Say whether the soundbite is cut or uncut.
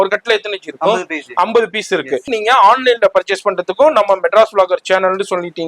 cut